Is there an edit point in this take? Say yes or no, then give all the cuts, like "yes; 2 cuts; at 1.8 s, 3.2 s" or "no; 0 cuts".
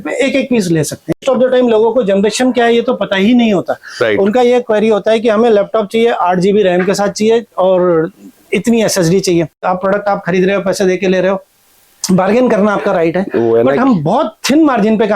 yes; 2 cuts; at 1.2 s, 9.6 s